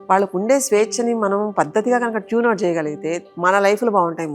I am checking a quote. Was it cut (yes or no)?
yes